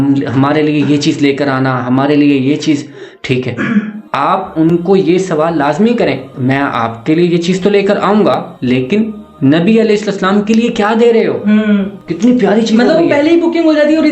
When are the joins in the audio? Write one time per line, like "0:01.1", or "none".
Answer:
none